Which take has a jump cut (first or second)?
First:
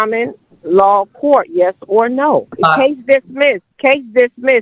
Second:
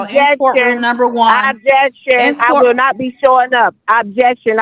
first